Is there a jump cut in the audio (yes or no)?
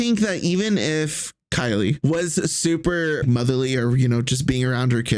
yes